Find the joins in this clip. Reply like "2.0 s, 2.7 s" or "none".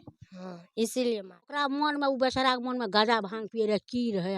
1.6 s